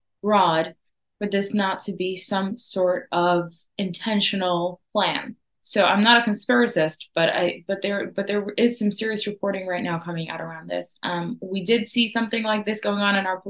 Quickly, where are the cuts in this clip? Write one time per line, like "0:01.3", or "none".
none